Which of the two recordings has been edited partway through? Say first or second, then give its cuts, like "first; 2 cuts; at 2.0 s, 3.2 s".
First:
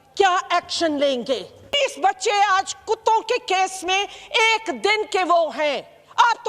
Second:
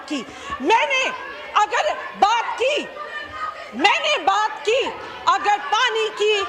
first; 1 cut; at 1.8 s